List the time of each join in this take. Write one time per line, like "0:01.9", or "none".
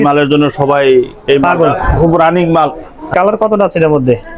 0:03.1